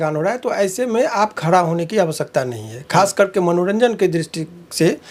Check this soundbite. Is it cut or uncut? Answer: uncut